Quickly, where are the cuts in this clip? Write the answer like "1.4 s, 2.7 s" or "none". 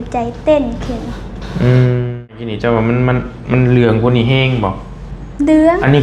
2.5 s